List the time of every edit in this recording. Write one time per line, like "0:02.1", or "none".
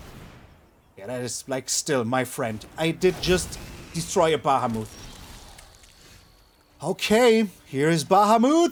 none